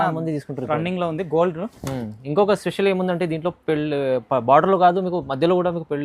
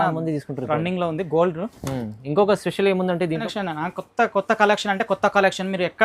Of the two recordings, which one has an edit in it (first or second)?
second